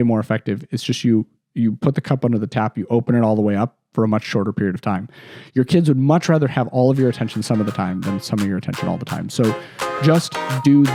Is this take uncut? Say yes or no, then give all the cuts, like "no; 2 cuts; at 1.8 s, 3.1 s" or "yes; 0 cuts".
yes; 0 cuts